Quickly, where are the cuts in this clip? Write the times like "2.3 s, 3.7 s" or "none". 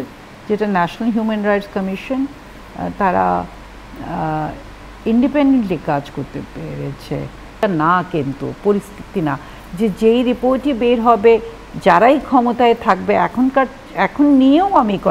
7.6 s

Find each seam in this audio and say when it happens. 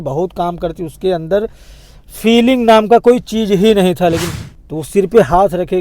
4.3 s

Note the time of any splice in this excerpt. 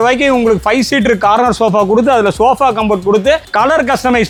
none

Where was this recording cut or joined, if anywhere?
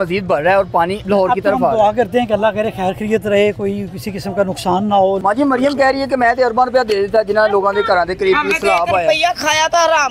1.0 s, 5.2 s

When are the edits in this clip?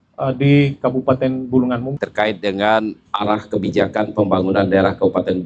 1.9 s

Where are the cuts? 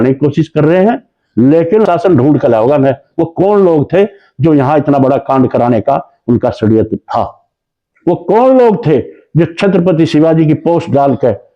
1.9 s

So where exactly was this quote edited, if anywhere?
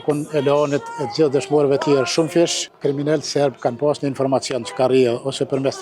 2.6 s

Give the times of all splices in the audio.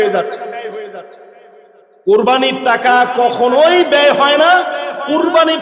none

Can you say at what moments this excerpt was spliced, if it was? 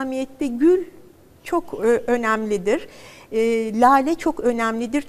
none

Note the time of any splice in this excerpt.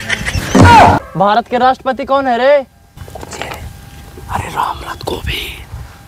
1.1 s, 2.9 s

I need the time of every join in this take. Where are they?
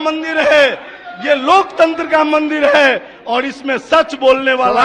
none

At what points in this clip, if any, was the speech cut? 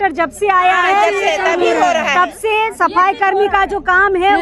none

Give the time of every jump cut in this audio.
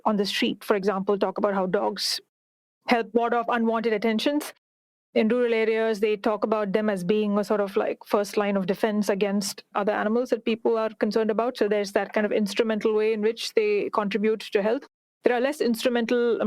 9.7 s

